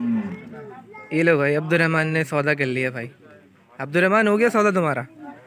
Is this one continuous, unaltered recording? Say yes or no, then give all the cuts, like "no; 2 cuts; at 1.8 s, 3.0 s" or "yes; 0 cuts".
yes; 0 cuts